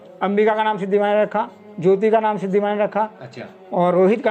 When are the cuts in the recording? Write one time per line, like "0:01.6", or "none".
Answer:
none